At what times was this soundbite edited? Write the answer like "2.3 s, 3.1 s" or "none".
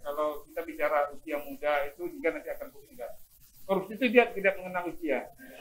none